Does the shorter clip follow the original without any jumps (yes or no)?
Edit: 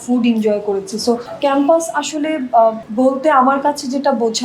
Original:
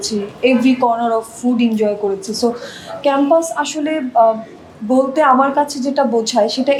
no